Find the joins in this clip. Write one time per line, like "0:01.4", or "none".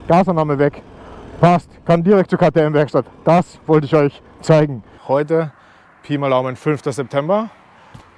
0:04.9